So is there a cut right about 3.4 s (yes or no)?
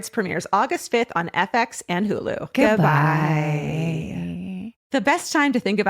no